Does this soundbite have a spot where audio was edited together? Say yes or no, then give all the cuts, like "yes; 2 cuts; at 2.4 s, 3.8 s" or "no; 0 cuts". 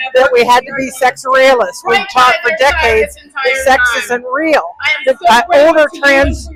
no; 0 cuts